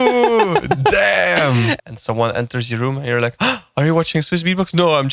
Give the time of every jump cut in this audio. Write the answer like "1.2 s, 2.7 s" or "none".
1.8 s